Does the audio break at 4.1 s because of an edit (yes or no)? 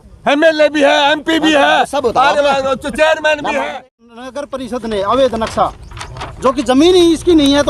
yes